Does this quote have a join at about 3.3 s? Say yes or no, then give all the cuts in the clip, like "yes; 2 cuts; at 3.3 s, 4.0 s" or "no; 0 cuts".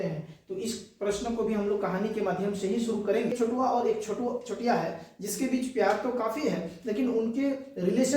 yes; 1 cut; at 3.3 s